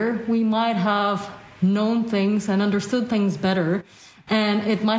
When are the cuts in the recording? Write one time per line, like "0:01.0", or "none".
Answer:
none